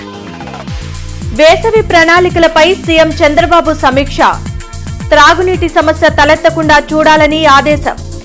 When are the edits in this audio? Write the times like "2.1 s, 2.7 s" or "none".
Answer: 1.2 s